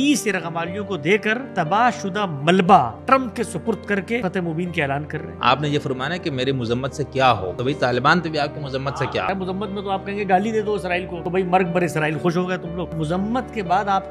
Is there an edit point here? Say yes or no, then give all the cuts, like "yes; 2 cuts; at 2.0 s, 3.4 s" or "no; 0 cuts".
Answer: yes; 8 cuts; at 1.5 s, 3.0 s, 4.2 s, 5.3 s, 7.5 s, 8.9 s, 11.2 s, 12.9 s